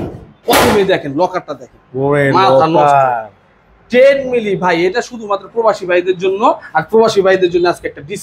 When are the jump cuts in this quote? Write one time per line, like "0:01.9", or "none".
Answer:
none